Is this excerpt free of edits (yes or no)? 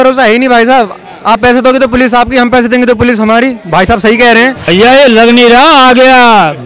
no